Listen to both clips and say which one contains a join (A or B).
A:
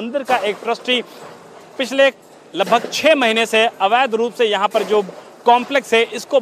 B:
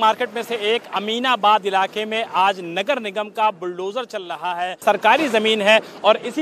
B